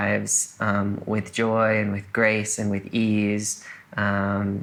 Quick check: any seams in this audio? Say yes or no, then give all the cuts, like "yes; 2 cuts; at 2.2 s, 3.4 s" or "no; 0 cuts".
no; 0 cuts